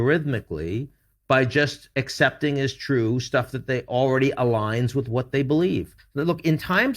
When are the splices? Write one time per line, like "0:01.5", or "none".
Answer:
0:06.0